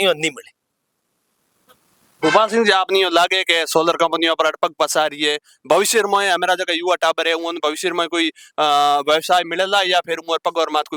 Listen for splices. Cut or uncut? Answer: uncut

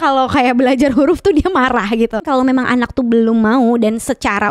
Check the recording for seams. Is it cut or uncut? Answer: cut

